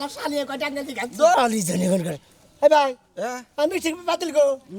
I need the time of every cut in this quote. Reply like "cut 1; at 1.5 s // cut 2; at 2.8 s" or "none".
cut 1; at 1.3 s